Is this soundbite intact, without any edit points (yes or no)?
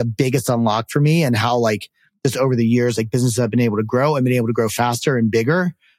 yes